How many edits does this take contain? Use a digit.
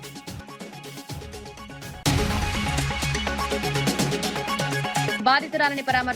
1